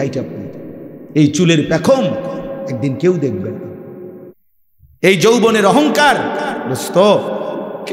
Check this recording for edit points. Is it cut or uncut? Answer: cut